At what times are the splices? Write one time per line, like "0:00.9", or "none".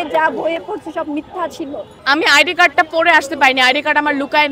0:01.9